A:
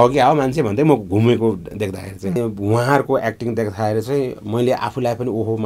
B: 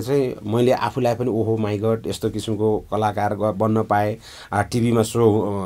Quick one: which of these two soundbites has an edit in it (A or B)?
A